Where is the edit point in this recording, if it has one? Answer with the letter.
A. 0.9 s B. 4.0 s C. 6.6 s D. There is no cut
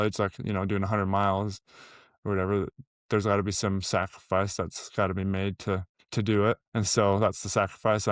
C